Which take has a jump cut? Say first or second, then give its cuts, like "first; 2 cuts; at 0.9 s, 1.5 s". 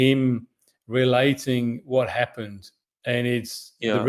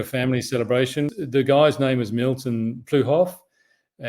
second; 1 cut; at 1.1 s